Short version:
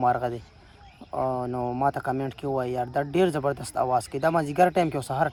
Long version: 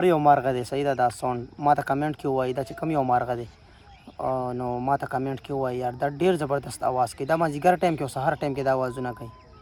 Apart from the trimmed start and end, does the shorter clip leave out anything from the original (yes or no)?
no